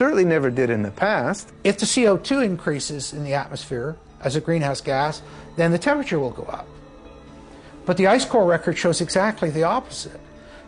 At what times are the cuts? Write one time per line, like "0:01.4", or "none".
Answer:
0:01.5

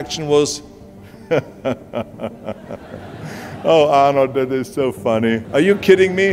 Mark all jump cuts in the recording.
0:05.4

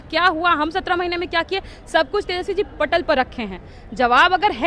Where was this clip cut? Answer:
none

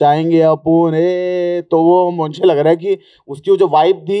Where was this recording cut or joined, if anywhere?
none

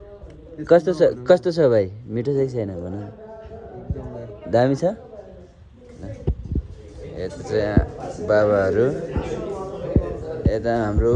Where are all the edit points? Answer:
none

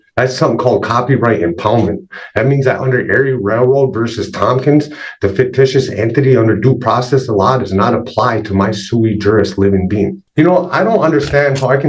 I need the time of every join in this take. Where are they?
0:10.2

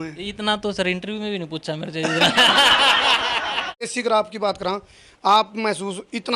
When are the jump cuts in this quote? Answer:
0:03.9

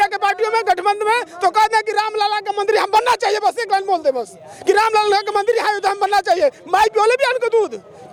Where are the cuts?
none

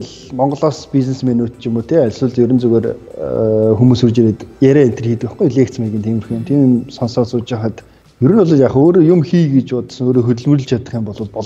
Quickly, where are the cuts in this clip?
none

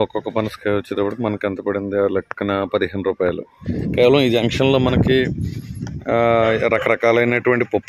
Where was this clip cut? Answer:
0:03.7

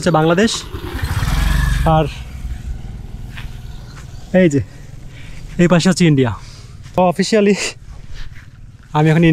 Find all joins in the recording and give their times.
0:07.0

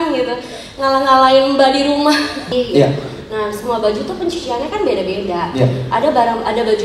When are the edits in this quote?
0:02.5

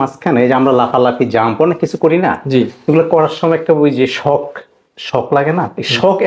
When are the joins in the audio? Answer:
none

